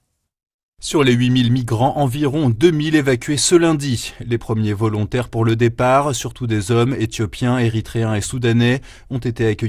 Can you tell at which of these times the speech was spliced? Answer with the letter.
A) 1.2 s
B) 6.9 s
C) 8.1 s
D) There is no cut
A